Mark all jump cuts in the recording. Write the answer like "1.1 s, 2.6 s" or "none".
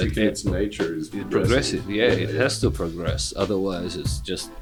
none